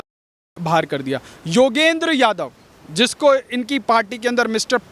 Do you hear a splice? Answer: no; 0 cuts

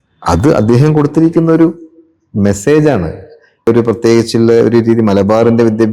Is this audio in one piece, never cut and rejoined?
no; 1 cut; at 3.7 s

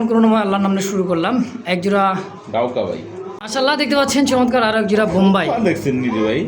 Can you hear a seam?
yes; 1 cut; at 3.3 s

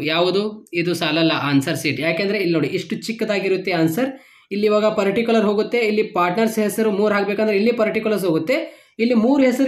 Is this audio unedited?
yes; 0 cuts

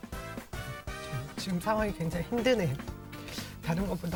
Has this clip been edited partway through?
no; 0 cuts

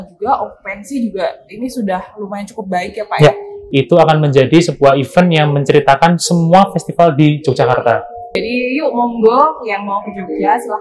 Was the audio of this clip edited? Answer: yes; 2 cuts; at 3.5 s, 8.4 s

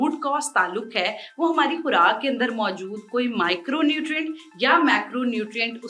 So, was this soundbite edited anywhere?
no; 0 cuts

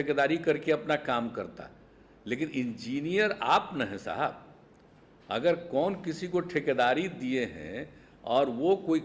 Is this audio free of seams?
yes; 0 cuts

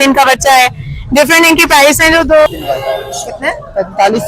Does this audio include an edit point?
yes; 1 cut; at 2.5 s

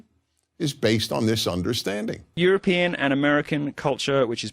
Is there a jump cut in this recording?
yes; 1 cut; at 2.2 s

